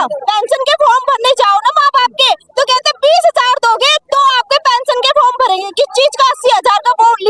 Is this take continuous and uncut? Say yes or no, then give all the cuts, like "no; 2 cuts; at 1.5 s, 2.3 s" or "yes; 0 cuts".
yes; 0 cuts